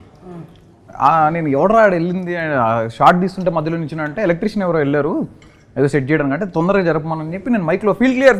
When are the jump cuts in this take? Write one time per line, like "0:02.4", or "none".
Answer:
none